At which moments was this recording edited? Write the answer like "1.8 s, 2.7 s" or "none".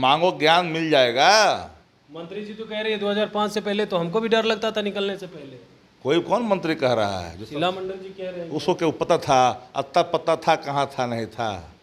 none